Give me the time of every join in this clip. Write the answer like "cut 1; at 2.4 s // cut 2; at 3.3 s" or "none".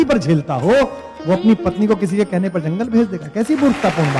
none